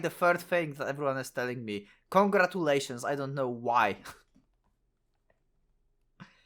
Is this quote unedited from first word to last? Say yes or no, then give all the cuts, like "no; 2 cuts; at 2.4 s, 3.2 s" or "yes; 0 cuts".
yes; 0 cuts